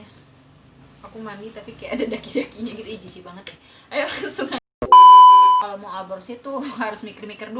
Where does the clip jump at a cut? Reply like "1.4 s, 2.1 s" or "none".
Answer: 4.3 s, 5.6 s